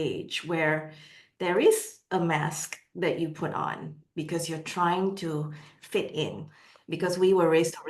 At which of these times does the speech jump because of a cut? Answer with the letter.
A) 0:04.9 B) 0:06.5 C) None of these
B